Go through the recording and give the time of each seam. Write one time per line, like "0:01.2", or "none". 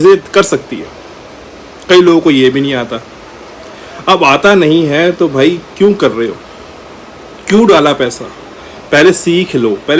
none